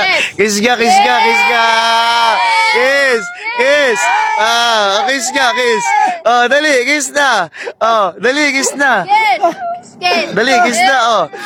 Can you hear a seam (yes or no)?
no